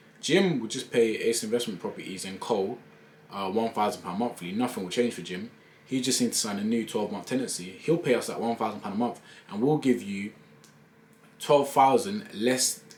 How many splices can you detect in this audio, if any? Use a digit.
0